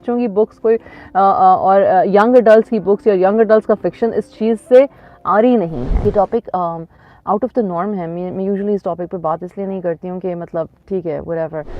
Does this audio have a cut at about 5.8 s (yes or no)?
yes